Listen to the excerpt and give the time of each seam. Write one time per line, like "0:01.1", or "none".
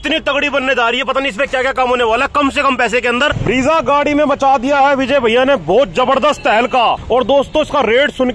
0:03.4
0:07.0